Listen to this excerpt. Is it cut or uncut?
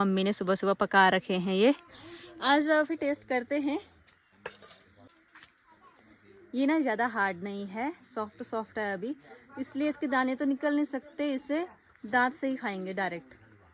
uncut